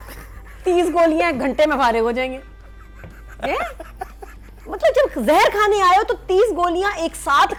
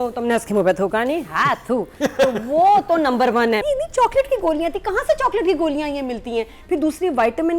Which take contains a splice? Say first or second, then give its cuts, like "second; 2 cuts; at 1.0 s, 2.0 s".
second; 1 cut; at 3.6 s